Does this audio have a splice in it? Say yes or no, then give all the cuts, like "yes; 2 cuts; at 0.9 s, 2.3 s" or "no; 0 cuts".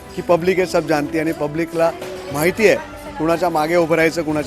no; 0 cuts